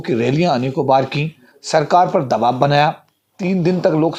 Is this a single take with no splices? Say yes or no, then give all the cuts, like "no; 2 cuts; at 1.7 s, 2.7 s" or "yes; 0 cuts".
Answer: yes; 0 cuts